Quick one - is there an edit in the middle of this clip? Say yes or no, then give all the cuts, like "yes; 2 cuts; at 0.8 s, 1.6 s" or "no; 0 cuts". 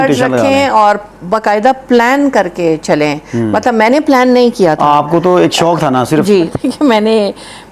yes; 1 cut; at 6.5 s